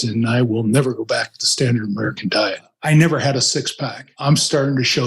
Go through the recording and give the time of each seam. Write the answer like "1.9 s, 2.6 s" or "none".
2.7 s, 4.1 s